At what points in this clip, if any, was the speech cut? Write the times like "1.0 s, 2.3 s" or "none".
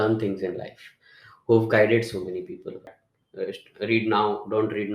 2.9 s